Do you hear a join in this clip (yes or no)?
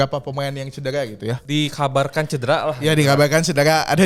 yes